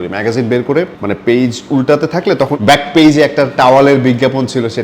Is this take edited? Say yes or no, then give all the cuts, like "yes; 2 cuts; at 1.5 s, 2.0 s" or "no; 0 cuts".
yes; 1 cut; at 2.6 s